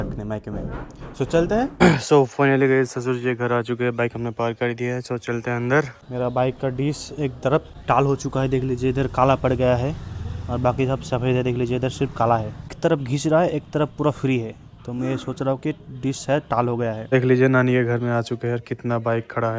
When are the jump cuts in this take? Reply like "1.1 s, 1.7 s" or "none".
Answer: 1.7 s, 6.0 s, 7.7 s, 12.7 s, 17.0 s